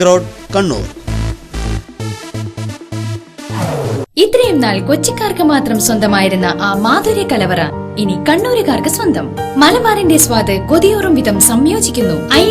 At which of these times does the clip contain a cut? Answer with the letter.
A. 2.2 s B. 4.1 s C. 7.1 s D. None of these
B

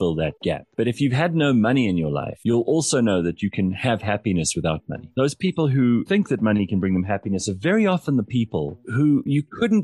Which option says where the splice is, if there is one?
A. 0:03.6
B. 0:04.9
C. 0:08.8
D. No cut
C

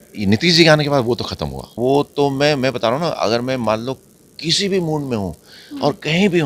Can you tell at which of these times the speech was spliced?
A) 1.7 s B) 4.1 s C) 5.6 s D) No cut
A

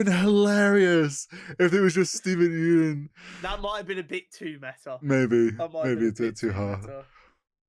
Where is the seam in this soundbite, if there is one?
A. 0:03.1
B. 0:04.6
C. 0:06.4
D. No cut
D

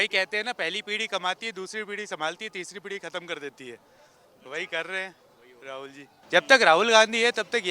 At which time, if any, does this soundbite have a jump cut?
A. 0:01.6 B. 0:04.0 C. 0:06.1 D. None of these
C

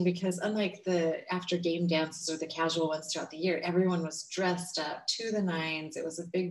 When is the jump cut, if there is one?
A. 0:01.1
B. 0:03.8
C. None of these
C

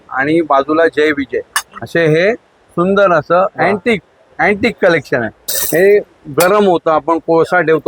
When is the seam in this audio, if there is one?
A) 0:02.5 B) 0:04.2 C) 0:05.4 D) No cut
C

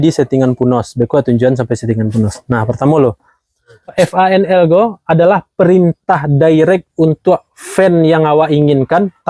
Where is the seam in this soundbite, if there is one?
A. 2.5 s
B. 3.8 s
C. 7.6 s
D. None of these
B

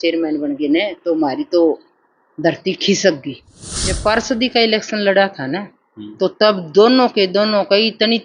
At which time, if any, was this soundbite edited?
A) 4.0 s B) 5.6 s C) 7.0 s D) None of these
A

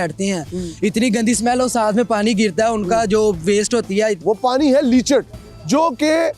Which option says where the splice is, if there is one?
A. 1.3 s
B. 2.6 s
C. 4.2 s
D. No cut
C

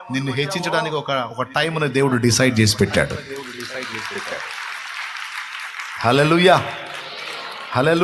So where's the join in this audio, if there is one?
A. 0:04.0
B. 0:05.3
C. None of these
C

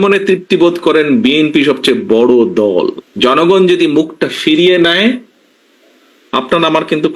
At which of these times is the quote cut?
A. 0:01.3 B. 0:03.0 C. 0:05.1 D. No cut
B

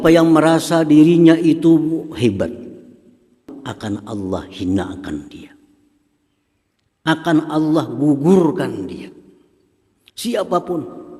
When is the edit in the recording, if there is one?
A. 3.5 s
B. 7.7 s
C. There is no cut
A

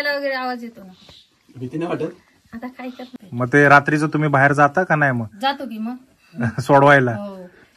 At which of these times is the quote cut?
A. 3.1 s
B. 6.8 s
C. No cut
A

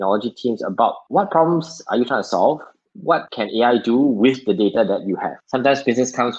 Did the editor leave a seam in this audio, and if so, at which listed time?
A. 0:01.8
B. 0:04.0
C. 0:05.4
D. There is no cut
C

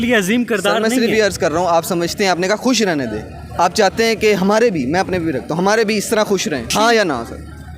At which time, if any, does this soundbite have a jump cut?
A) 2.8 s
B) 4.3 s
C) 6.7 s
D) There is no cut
C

